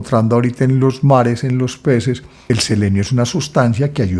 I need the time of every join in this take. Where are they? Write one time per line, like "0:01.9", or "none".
none